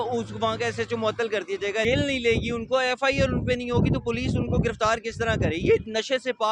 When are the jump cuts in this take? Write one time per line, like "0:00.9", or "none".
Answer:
0:01.8